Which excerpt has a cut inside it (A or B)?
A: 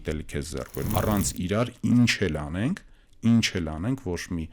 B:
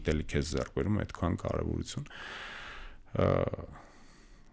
A